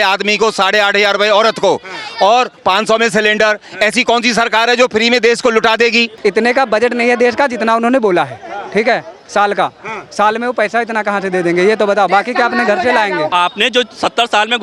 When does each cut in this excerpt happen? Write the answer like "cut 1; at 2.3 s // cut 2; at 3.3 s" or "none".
cut 1; at 6.1 s // cut 2; at 13.3 s